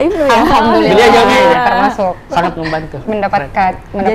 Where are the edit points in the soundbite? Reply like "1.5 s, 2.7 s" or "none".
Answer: none